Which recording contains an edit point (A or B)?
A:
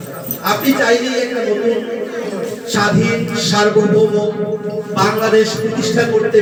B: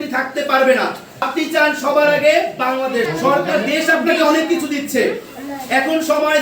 B